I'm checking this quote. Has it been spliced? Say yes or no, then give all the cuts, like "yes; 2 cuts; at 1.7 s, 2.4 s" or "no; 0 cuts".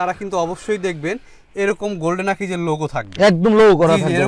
no; 0 cuts